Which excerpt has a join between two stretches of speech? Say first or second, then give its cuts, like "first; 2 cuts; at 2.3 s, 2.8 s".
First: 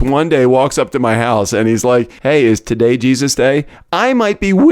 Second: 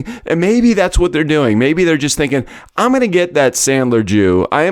first; 1 cut; at 2.1 s